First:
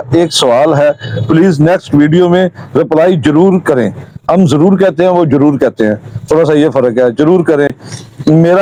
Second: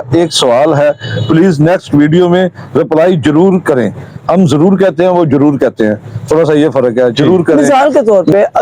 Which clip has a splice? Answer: second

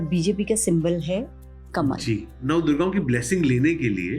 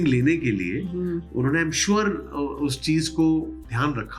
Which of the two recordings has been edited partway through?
first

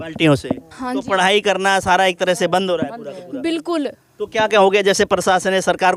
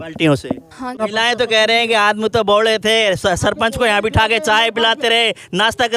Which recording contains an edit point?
second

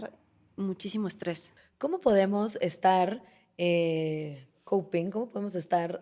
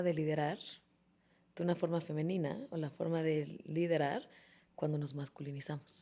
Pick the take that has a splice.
first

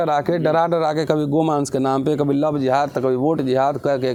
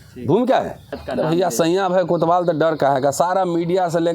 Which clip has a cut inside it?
second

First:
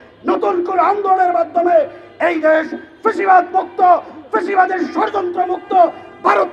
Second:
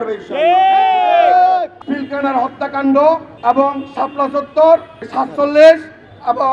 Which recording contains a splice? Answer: second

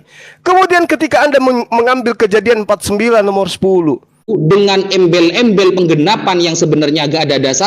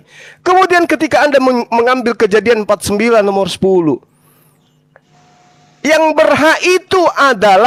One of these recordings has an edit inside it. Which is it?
first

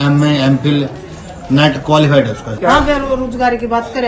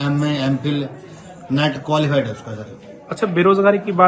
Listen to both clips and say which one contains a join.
first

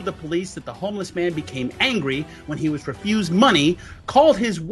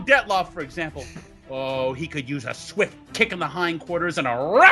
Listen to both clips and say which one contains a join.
first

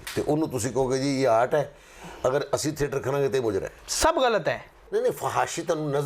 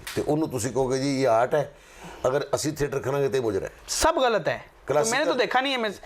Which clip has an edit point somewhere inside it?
first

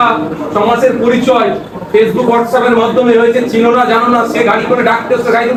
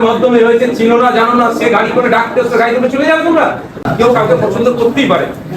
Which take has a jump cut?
second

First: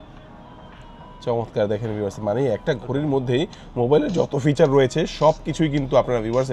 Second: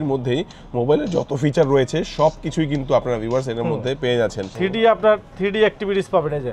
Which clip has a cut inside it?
second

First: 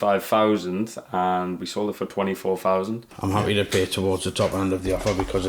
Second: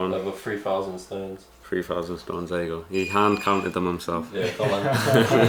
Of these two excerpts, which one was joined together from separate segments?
first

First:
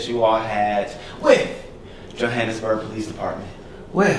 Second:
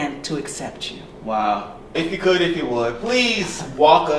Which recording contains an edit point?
second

